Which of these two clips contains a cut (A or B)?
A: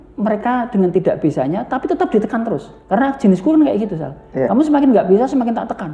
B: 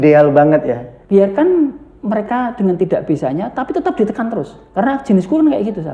B